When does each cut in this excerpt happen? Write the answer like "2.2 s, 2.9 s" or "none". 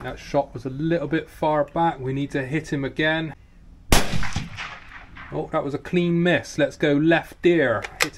3.4 s